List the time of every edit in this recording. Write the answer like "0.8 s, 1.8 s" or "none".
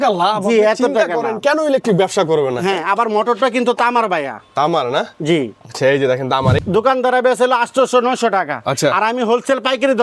6.6 s